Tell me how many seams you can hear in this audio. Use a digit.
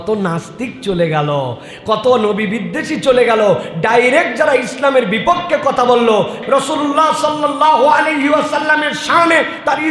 1